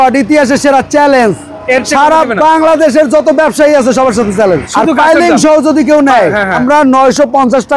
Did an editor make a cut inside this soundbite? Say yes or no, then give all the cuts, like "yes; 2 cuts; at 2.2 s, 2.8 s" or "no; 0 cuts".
yes; 2 cuts; at 4.7 s, 6.6 s